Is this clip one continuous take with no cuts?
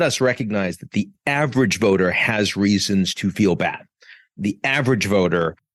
yes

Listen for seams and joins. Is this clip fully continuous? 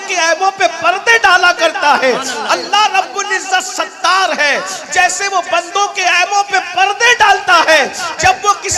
yes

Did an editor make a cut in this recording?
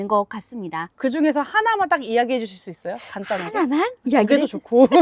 yes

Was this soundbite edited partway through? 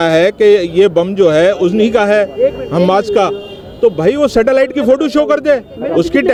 no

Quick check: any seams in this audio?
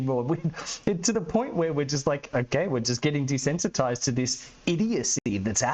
no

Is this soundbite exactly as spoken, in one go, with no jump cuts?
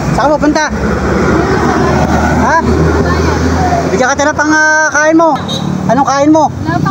no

